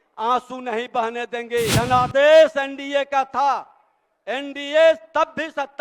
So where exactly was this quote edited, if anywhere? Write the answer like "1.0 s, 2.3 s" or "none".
1.7 s